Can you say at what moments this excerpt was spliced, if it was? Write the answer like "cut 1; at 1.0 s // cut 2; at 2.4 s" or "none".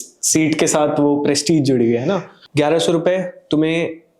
cut 1; at 2.4 s